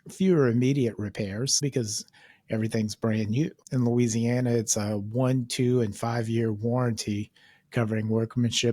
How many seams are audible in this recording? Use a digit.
2